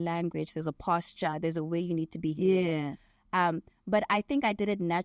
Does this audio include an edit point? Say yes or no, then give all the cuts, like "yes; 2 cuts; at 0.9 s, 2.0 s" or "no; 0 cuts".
no; 0 cuts